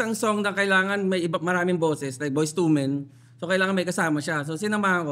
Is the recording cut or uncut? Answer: uncut